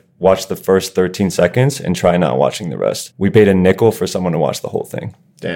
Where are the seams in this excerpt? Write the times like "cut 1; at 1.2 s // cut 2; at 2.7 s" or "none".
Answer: cut 1; at 3.1 s